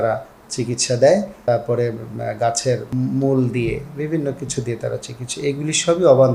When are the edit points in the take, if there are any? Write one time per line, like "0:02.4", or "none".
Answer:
0:01.4
0:02.9